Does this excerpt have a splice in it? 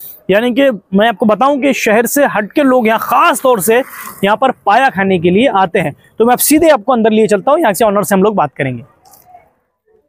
no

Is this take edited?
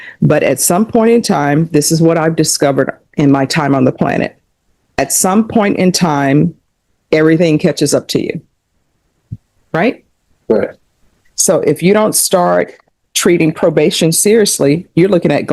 no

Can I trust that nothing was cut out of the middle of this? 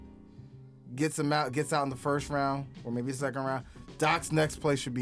yes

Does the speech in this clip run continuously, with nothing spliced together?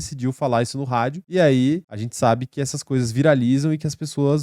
no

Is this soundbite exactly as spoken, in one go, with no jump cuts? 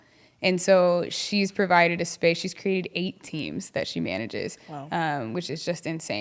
yes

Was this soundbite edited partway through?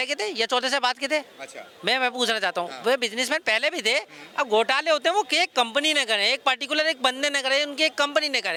no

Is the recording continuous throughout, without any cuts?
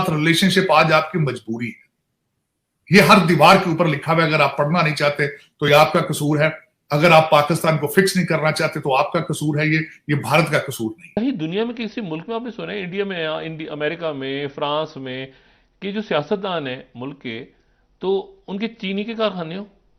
yes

